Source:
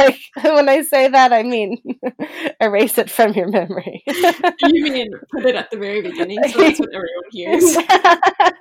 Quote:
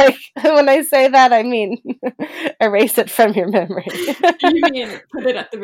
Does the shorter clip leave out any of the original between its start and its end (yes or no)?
yes